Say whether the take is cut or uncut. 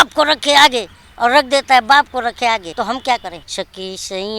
cut